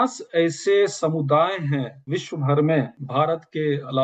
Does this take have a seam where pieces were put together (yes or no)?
yes